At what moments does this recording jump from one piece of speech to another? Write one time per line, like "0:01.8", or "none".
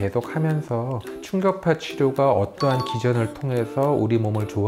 none